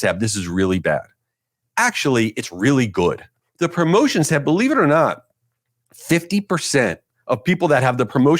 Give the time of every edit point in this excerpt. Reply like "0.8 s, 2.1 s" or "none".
3.3 s